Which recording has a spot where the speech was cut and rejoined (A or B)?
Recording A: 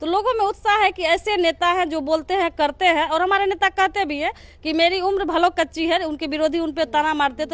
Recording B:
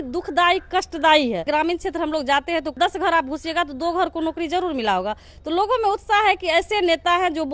B